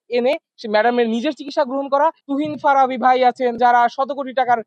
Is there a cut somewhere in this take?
yes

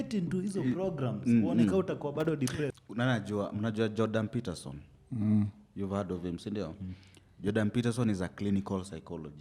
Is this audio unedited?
no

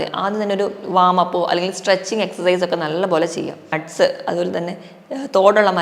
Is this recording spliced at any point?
yes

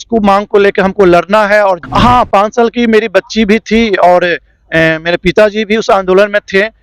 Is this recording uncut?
no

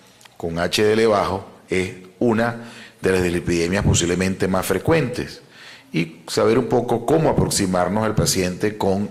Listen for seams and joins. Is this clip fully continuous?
yes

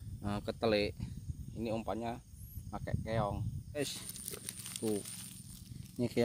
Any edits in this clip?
yes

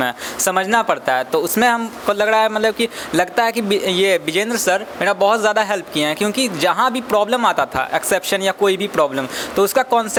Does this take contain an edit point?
no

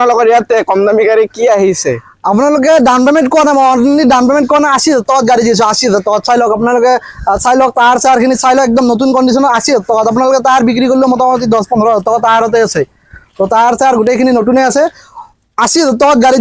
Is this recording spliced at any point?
no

